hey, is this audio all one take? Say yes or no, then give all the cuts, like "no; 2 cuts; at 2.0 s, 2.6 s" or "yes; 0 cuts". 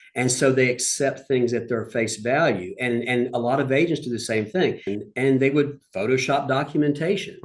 no; 1 cut; at 4.9 s